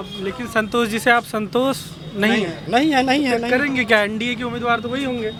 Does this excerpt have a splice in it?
no; 0 cuts

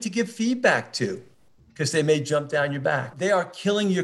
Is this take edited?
yes; 1 cut; at 3.1 s

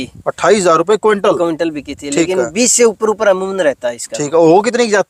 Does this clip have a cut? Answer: no; 0 cuts

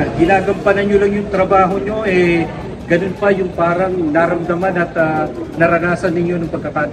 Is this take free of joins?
yes; 0 cuts

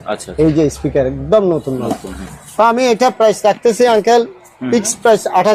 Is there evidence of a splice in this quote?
no; 0 cuts

